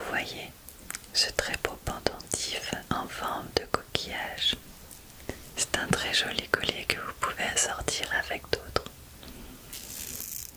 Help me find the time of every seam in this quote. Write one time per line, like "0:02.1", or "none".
0:04.7
0:09.3